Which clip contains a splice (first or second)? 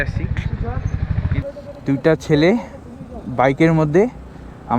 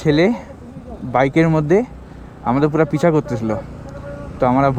first